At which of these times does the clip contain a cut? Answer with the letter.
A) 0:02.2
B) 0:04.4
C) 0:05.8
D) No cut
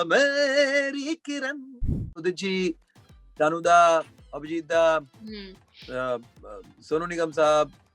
A